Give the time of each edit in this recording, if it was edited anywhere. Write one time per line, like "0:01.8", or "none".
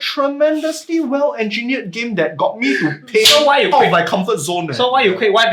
none